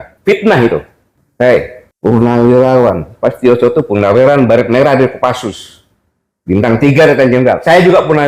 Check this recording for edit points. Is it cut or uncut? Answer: cut